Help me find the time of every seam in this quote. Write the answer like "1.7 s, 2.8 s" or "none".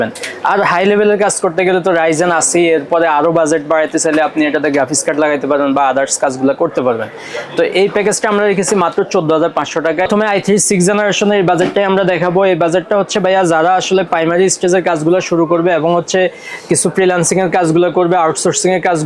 10.1 s